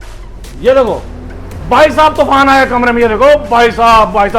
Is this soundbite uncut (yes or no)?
yes